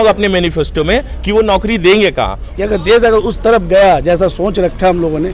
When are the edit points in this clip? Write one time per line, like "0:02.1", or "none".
0:02.4

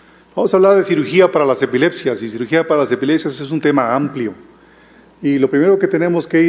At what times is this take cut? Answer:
0:02.0

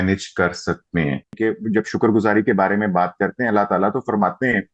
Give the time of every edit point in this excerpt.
0:01.4

